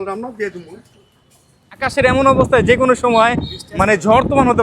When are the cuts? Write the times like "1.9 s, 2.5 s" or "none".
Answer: 1.9 s

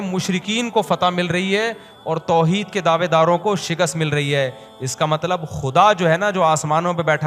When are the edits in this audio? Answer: none

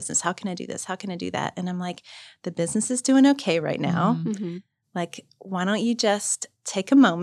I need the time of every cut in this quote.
none

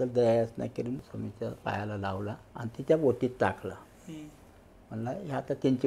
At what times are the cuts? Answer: 1.0 s, 2.5 s

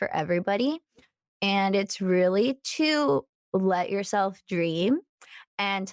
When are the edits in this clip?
none

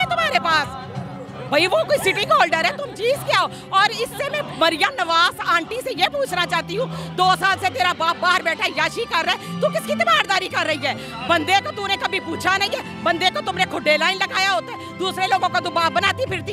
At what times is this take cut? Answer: none

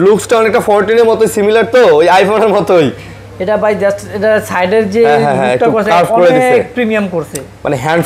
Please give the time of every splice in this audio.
none

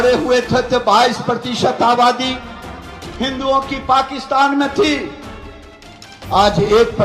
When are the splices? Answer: none

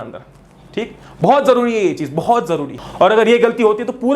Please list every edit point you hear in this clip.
2.8 s

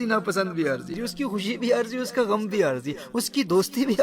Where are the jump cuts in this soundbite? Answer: 1.0 s

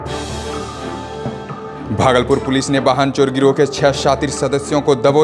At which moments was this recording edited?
1.3 s

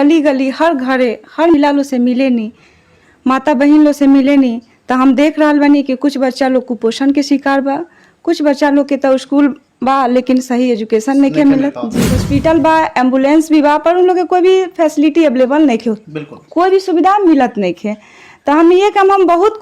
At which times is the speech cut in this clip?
1.5 s, 12.2 s

